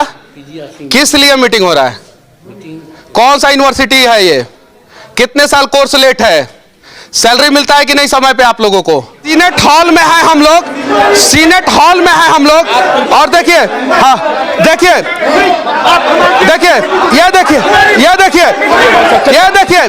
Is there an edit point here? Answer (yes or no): yes